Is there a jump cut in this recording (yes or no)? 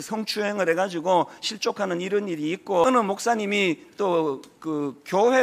yes